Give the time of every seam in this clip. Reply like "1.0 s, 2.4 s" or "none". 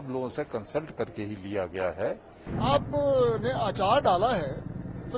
2.4 s